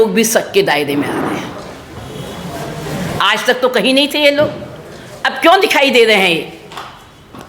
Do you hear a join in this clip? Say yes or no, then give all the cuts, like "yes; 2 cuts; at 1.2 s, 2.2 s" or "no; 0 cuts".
no; 0 cuts